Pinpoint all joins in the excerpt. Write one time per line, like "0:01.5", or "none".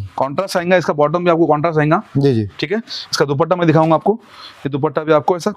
none